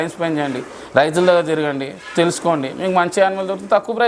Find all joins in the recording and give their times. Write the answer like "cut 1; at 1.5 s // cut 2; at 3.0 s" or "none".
none